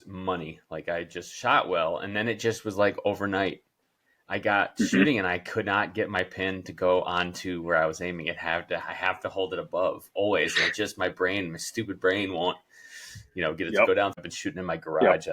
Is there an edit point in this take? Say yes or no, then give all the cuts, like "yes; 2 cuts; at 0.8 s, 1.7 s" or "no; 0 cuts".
yes; 1 cut; at 14.2 s